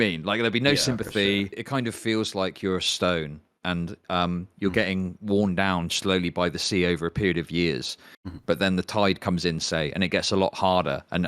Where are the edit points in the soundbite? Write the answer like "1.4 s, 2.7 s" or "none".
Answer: 1.6 s